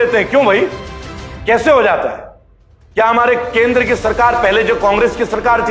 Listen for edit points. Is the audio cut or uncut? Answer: uncut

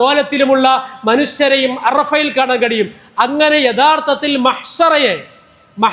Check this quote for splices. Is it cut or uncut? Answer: uncut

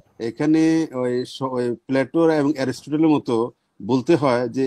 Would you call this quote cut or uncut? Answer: uncut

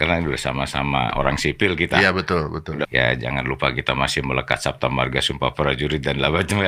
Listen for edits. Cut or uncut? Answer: cut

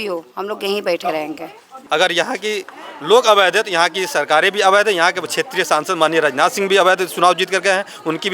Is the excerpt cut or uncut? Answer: cut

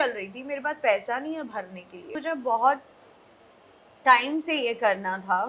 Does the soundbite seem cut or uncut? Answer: cut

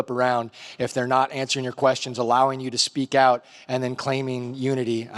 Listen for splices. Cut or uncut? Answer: uncut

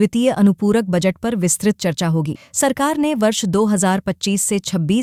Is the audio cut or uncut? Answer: uncut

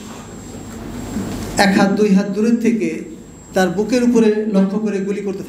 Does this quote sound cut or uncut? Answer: uncut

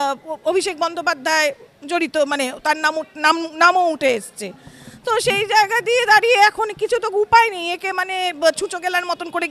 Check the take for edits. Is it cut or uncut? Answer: uncut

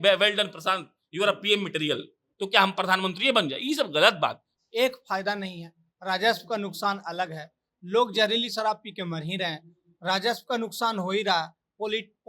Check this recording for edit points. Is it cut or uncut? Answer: cut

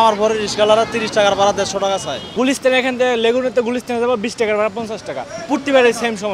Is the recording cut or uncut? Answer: cut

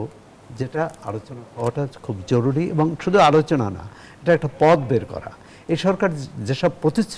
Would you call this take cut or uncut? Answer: uncut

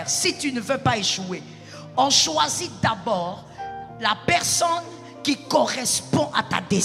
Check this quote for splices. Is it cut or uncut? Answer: uncut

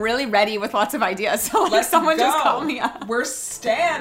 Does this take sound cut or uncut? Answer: uncut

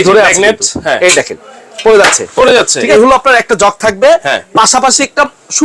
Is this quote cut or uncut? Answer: cut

